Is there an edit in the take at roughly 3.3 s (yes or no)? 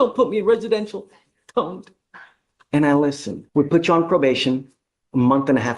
yes